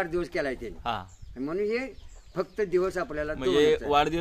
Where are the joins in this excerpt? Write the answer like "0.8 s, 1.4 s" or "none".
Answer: none

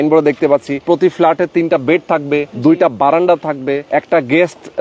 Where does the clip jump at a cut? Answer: 0.8 s, 2.5 s, 3.8 s

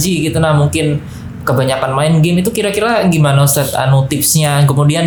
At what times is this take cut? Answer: none

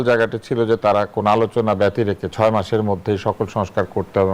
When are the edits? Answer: none

